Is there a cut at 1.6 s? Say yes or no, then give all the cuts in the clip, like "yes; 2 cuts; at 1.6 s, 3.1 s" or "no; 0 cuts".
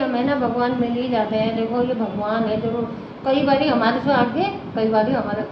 no; 0 cuts